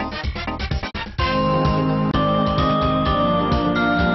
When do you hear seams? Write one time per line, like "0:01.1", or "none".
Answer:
0:01.8